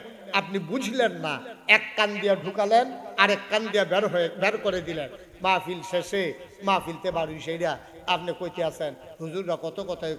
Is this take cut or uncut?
uncut